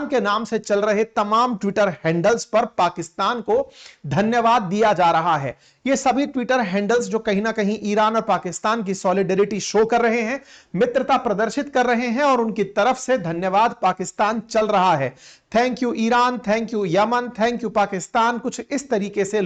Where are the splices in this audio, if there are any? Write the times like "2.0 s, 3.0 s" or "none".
none